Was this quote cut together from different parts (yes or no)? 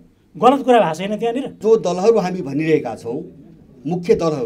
yes